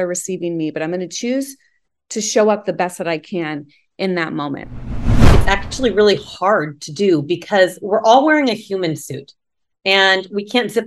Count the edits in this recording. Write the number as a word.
one